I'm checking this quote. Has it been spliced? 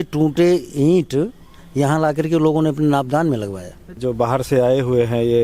yes; 1 cut; at 4.0 s

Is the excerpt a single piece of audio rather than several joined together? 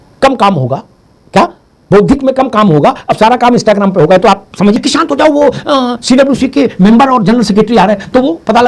no; 1 cut; at 4.8 s

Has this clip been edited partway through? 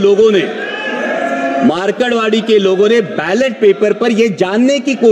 no; 0 cuts

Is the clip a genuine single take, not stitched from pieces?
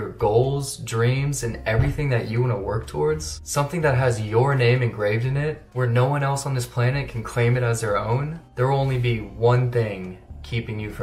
yes; 0 cuts

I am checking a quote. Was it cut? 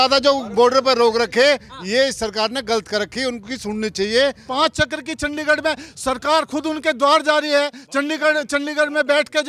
yes; 1 cut; at 4.4 s

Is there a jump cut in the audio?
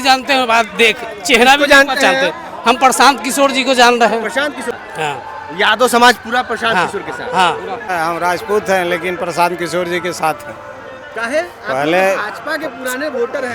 yes; 2 cuts; at 4.7 s, 7.9 s

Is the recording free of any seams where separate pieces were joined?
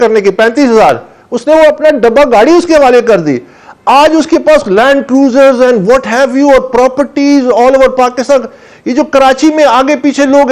yes; 0 cuts

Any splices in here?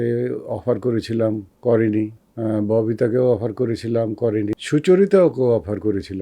yes; 3 cuts; at 1.5 s, 2.2 s, 4.5 s

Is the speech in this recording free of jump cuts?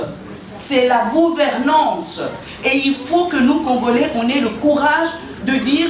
yes; 0 cuts

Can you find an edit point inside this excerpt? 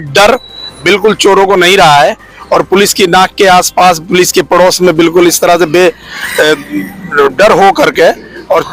no; 0 cuts

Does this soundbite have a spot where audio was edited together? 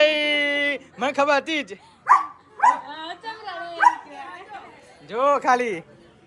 no; 0 cuts

